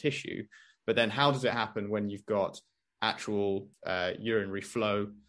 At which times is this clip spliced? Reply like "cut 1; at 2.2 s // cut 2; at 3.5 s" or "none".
cut 1; at 3.7 s